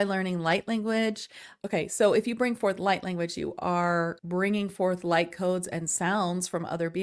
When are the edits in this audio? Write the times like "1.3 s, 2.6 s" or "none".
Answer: none

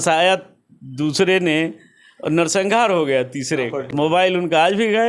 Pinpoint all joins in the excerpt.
3.8 s

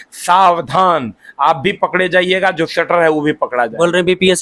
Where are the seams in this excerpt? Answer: none

